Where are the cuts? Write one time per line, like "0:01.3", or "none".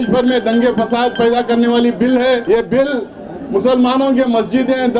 0:02.4